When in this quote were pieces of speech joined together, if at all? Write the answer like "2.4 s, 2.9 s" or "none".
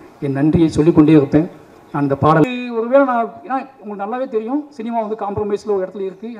2.4 s